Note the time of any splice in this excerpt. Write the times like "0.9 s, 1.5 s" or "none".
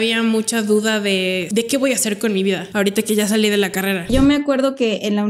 1.4 s, 2.7 s, 4.1 s